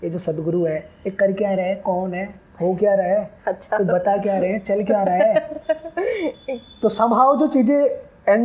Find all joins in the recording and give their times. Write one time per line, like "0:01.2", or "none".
none